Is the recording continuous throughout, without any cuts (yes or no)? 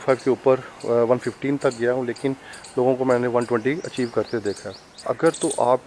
no